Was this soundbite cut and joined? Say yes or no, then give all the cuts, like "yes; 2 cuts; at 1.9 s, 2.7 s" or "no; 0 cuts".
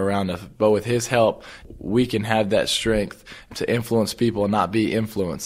no; 0 cuts